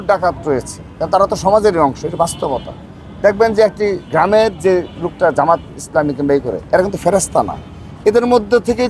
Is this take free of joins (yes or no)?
yes